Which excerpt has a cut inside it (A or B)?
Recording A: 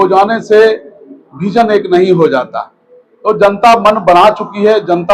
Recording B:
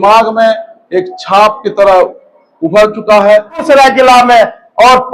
B